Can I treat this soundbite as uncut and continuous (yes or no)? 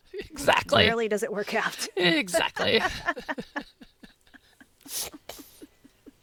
yes